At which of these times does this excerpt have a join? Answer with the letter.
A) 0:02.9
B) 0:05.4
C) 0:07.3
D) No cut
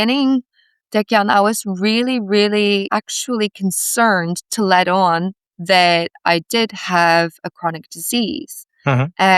A